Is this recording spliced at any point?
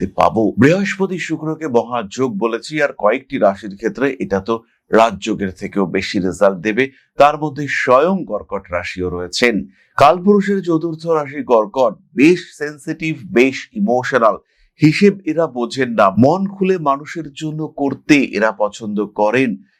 no; 0 cuts

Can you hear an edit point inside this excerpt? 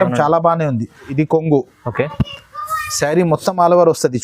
yes; 1 cut; at 1.1 s

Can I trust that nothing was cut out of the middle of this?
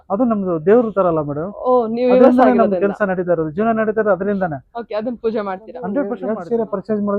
no; 1 cut; at 6.2 s

